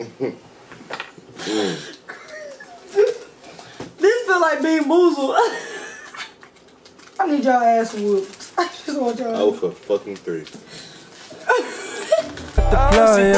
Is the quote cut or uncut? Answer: cut